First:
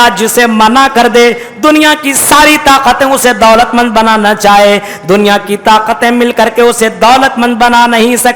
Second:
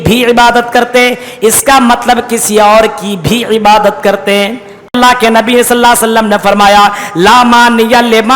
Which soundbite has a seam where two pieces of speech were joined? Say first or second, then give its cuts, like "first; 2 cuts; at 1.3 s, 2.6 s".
second; 1 cut; at 4.9 s